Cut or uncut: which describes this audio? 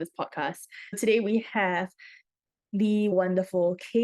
cut